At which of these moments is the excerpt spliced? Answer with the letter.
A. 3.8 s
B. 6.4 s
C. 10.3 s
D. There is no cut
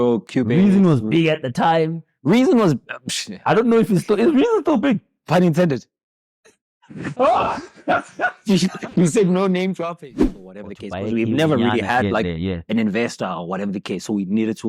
C